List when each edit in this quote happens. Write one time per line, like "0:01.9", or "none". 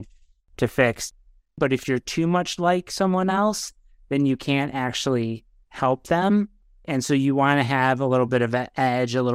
0:01.1
0:06.9